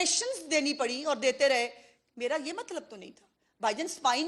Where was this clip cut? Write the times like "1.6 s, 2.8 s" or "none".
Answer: none